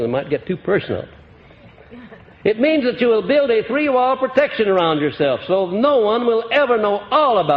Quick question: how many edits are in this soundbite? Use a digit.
1